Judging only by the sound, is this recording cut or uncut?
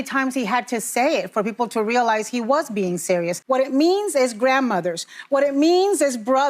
cut